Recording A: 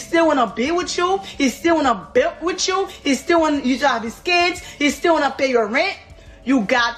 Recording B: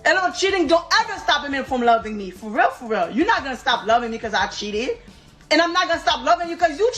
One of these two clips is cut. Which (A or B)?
B